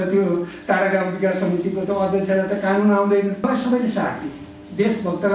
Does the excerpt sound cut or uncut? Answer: cut